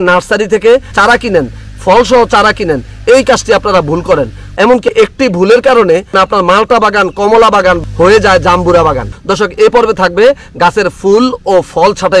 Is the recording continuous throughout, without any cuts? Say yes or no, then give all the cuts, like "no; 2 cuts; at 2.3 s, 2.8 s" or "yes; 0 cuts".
no; 3 cuts; at 0.9 s, 4.8 s, 9.1 s